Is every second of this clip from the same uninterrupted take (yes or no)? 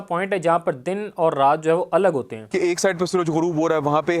no